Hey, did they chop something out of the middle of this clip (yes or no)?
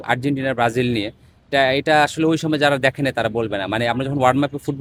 no